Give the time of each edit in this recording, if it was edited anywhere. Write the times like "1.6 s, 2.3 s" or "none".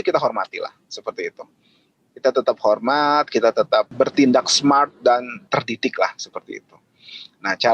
3.9 s, 5.4 s